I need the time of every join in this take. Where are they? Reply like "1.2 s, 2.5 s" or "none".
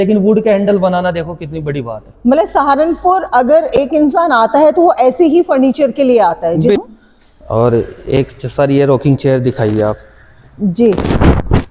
6.8 s